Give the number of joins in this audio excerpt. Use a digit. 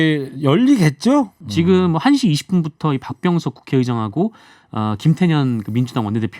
1